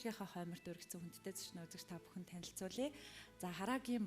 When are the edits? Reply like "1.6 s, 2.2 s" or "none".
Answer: none